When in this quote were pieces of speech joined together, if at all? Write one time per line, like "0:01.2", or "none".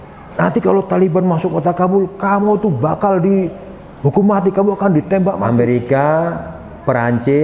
0:05.4

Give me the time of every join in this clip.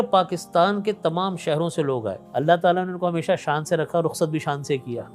0:02.2

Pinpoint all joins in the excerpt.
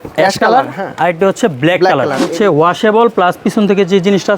0:02.2

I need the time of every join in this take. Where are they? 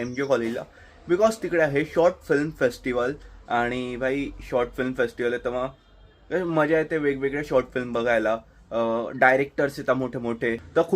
none

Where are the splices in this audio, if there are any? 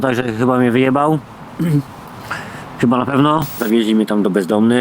0:03.6

